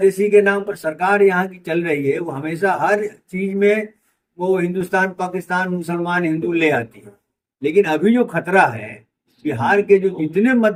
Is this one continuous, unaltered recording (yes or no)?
yes